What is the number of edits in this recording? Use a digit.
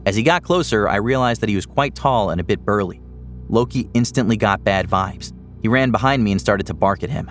0